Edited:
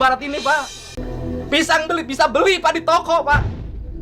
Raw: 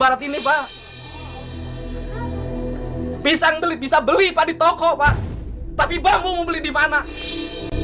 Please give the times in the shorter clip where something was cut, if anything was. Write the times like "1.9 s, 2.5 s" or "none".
1.0 s